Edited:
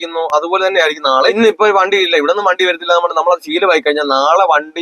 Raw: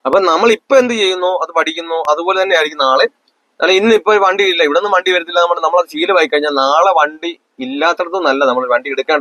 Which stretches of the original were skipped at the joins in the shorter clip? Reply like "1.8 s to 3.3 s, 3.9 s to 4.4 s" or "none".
3.1 s to 3.8 s